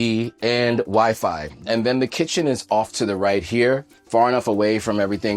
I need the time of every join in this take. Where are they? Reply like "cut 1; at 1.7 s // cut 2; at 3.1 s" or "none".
cut 1; at 1.5 s